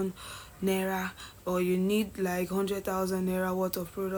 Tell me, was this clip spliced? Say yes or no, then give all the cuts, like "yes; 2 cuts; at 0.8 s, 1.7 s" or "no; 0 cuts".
no; 0 cuts